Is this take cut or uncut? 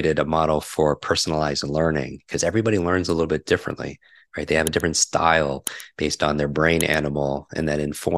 uncut